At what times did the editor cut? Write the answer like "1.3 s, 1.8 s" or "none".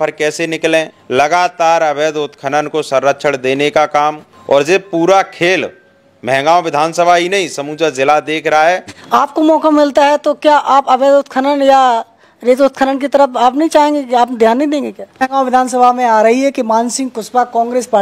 1.0 s, 4.3 s, 8.9 s, 15.3 s